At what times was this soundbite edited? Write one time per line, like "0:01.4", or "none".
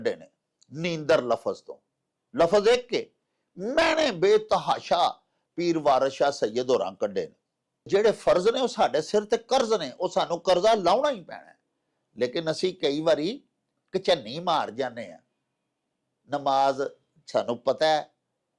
0:07.9